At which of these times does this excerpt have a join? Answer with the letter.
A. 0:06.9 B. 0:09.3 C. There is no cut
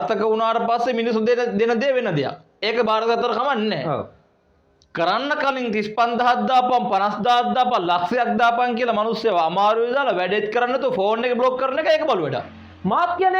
C